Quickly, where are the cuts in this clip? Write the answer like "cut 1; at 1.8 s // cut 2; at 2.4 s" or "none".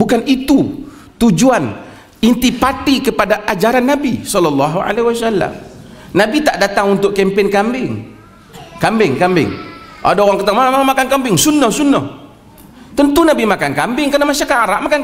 none